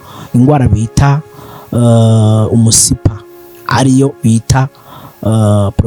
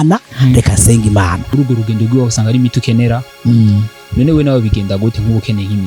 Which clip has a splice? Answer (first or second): second